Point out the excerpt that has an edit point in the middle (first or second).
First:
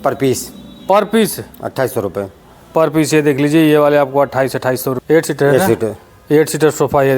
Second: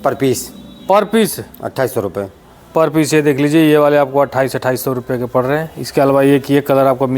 first